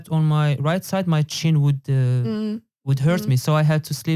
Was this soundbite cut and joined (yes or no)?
no